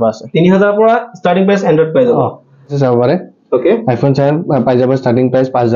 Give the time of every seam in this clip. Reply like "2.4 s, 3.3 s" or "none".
2.7 s